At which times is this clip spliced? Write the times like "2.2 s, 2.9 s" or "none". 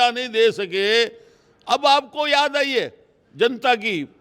none